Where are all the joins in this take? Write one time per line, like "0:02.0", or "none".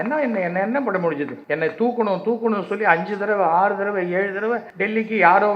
0:01.4
0:04.7

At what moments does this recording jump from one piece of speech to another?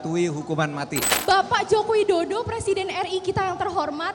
0:01.1

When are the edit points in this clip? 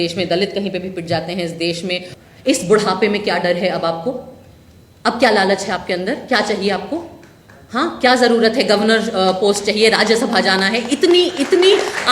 0:02.1

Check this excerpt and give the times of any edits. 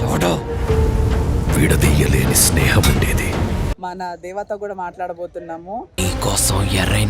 0:03.7

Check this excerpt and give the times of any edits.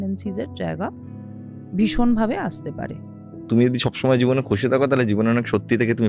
0:03.4

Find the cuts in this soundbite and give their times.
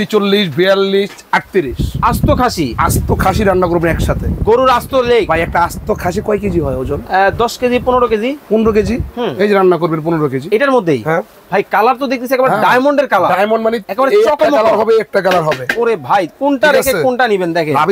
none

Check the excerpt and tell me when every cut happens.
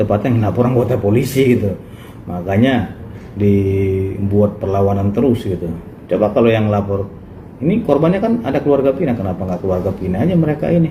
none

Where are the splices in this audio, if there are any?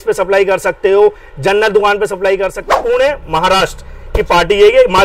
0:02.7

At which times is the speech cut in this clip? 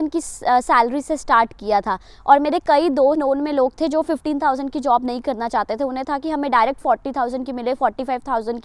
none

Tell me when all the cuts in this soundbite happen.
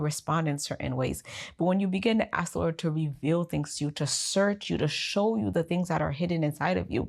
none

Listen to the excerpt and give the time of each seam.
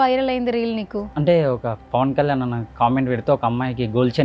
0:01.1

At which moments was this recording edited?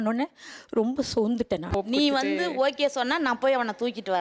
0:01.7

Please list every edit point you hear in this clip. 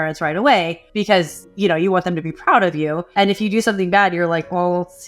0:01.0
0:03.0

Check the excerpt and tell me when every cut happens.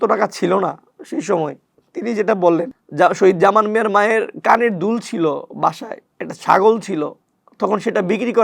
0:07.2

